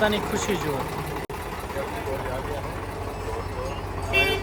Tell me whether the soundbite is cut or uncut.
uncut